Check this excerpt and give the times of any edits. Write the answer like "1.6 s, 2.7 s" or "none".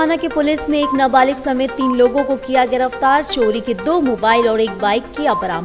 none